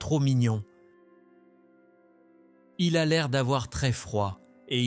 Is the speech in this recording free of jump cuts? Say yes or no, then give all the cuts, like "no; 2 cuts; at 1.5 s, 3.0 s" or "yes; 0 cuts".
no; 2 cuts; at 1.2 s, 2.8 s